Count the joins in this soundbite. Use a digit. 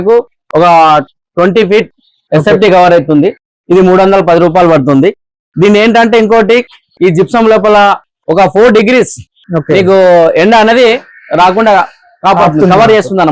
0